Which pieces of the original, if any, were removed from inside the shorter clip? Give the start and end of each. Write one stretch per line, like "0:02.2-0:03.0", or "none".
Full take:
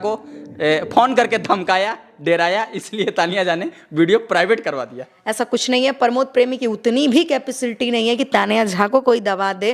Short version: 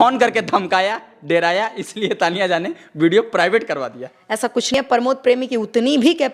0:05.7-0:05.8

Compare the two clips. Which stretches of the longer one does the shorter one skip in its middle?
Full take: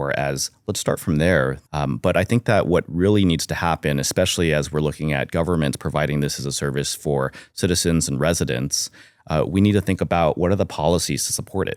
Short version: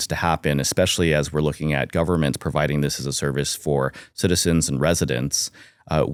none

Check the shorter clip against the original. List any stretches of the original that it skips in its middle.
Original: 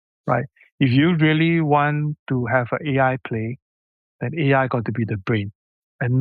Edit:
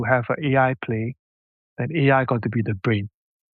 none

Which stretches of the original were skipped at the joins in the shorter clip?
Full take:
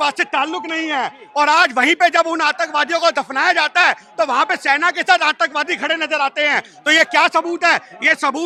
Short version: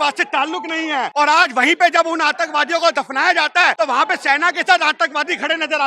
0:01.1-0:01.3
0:03.9-0:04.1

